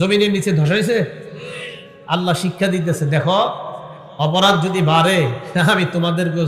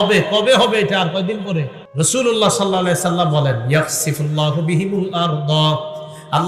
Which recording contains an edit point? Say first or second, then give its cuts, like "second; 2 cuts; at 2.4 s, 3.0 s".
second; 1 cut; at 1.8 s